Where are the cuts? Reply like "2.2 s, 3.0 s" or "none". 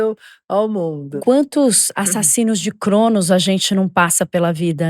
1.2 s